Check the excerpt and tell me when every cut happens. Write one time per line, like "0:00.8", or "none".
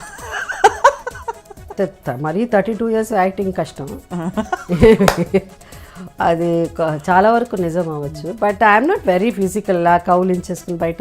0:01.7